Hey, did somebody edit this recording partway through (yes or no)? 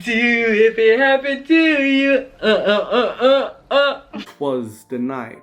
yes